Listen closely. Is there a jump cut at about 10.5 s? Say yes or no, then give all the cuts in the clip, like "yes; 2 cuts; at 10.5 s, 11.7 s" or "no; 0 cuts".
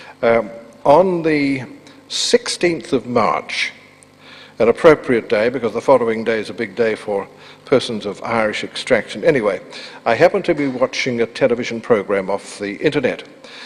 no; 0 cuts